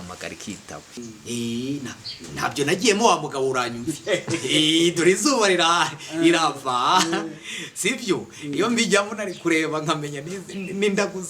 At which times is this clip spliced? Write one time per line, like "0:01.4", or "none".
0:01.0